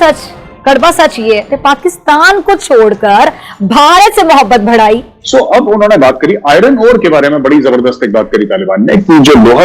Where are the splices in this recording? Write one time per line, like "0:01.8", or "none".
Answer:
0:01.5
0:05.1